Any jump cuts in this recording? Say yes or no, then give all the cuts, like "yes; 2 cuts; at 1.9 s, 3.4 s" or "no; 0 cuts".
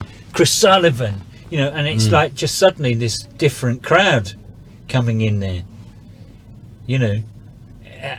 no; 0 cuts